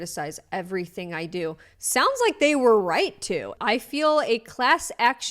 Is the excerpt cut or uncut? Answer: cut